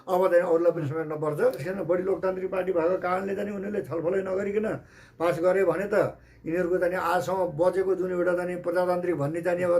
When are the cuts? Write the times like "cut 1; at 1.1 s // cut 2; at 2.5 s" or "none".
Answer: cut 1; at 1.6 s